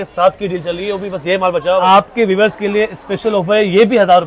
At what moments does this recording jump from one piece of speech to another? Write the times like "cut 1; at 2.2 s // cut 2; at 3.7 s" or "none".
cut 1; at 1.8 s